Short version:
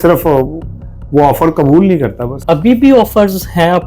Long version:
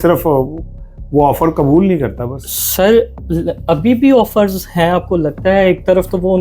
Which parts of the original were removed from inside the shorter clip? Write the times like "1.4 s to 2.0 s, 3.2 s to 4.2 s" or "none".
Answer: 2.3 s to 3.5 s